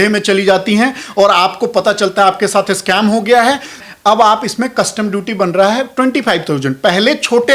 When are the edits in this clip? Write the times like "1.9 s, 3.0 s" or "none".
3.8 s